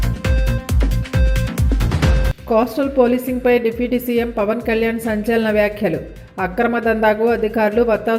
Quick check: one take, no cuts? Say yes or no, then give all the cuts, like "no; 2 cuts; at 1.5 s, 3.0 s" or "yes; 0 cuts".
no; 1 cut; at 2.3 s